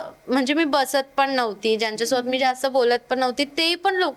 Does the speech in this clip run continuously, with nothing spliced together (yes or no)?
yes